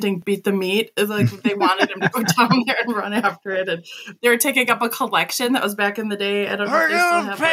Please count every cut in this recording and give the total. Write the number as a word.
zero